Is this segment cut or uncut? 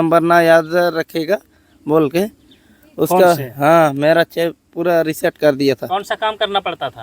cut